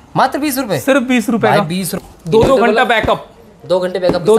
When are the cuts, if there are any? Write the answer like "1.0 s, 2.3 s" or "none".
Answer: 1.9 s

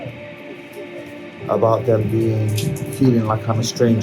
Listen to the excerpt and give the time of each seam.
none

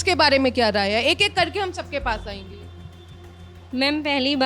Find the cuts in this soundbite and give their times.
none

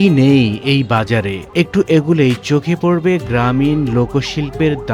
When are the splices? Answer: none

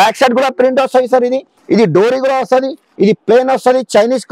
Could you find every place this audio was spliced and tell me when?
1.5 s, 2.8 s

